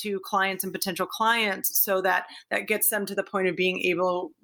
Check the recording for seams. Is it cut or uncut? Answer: uncut